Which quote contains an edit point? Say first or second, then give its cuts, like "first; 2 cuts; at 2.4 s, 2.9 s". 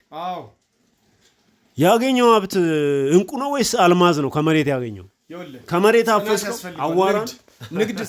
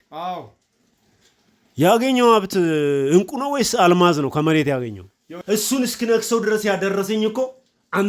second; 1 cut; at 5.3 s